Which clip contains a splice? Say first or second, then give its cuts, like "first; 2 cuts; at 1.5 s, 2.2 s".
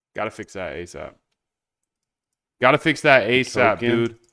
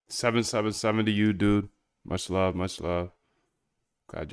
first; 2 cuts; at 0.9 s, 3.0 s